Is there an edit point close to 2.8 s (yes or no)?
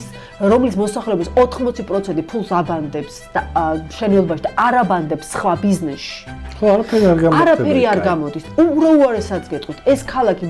no